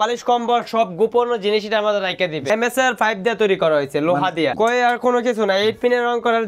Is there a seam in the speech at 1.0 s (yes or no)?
no